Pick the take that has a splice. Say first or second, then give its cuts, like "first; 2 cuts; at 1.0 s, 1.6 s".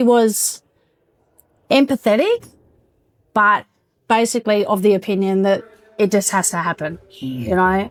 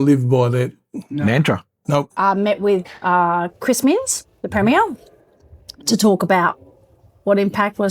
second; 1 cut; at 2.2 s